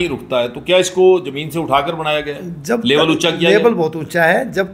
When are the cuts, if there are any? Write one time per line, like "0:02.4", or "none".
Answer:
none